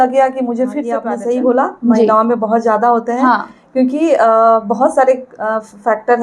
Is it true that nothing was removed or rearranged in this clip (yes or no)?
no